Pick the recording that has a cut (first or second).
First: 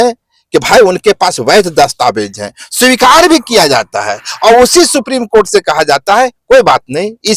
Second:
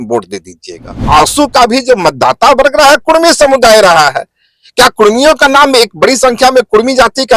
second